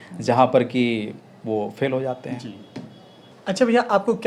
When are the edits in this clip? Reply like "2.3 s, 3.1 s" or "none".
none